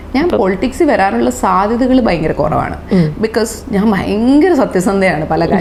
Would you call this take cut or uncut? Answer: uncut